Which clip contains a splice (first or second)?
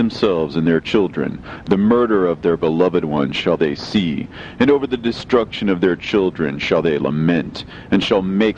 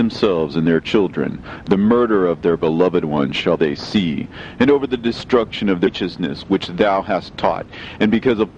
first